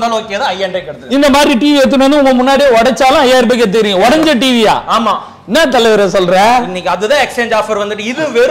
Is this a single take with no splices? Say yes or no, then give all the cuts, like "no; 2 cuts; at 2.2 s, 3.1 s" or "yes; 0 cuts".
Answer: yes; 0 cuts